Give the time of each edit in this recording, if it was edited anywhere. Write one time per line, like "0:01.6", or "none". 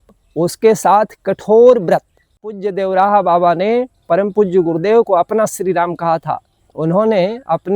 0:02.6